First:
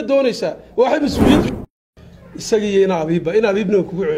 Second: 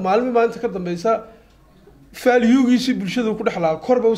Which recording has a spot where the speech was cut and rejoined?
first; 1 cut; at 1.5 s

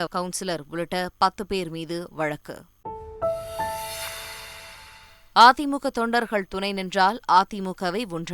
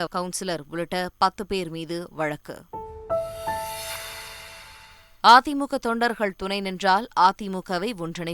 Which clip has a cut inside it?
first; 2 cuts; at 2.9 s, 4.9 s

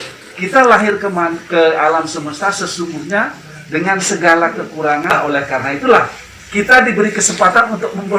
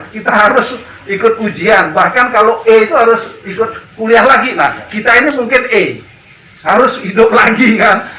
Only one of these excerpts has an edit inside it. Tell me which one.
first; 1 cut; at 5.1 s

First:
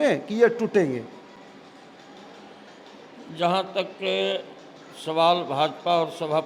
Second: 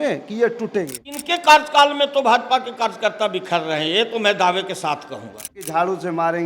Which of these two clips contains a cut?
second; 2 cuts; at 1.2 s, 5.6 s

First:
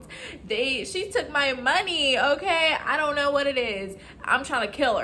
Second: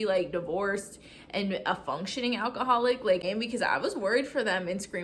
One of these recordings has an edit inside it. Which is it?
second; 1 cut; at 3.2 s

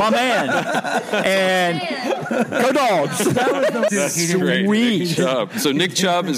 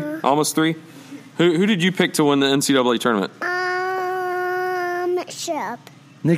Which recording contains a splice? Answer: first; 1 cut; at 3.9 s

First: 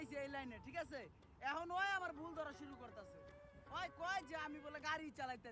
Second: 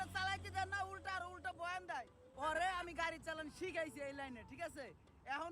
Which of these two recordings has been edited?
second; 1 cut; at 2.2 s

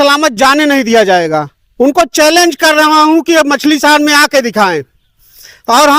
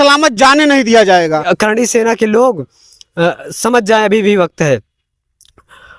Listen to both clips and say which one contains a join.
second; 1 cut; at 1.5 s

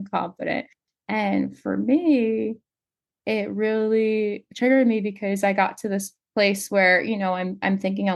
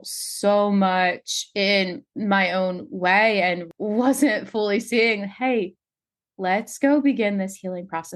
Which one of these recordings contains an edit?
second; 1 cut; at 3.7 s

